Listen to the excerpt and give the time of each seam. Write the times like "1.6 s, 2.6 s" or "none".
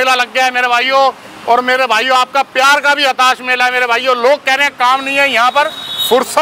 none

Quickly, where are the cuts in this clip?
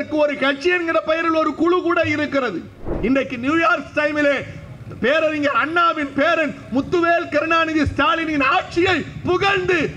2.9 s

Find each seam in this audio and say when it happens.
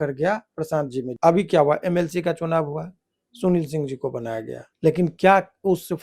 1.1 s, 4.6 s

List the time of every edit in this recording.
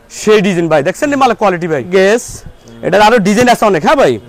1.9 s

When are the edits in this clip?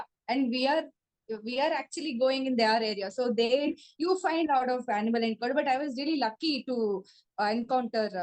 none

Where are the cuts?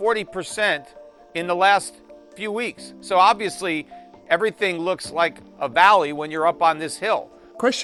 none

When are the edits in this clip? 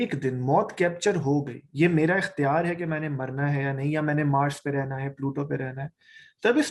none

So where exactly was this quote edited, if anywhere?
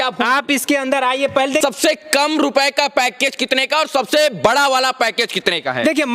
1.6 s

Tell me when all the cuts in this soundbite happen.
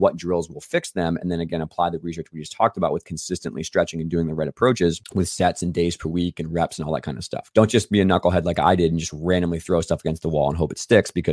5.0 s, 7.3 s

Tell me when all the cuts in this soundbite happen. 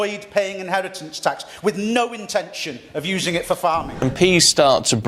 3.9 s

